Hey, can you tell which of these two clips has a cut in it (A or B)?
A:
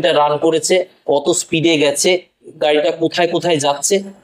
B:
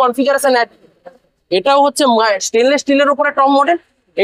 A